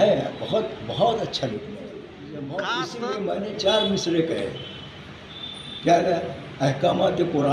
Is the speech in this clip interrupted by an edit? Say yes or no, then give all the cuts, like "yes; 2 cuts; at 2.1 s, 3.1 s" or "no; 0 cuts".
yes; 1 cut; at 2.9 s